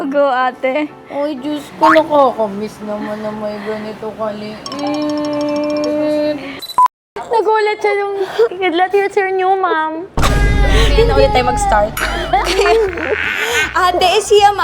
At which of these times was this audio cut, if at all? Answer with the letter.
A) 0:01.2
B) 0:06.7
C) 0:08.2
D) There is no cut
B